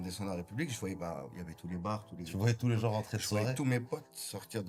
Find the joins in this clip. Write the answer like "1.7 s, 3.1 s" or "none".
none

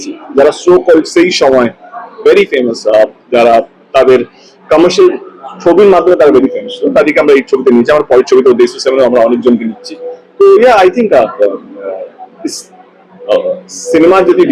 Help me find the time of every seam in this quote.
none

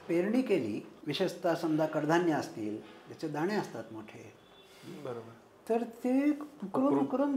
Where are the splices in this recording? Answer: 0.9 s

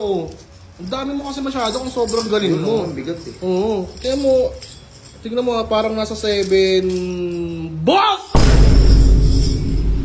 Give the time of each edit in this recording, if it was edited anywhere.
none

